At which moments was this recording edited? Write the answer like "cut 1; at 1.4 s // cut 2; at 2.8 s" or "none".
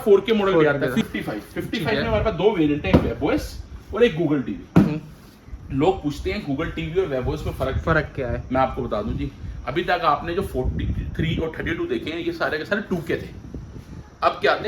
cut 1; at 1.0 s